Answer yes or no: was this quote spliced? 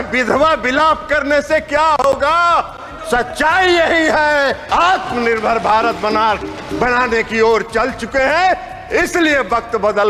yes